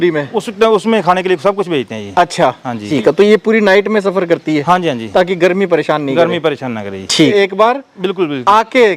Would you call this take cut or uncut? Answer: cut